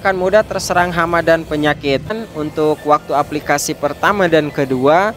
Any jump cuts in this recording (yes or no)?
yes